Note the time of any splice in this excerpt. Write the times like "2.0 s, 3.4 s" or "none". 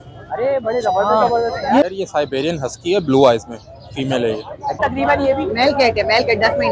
1.8 s, 4.8 s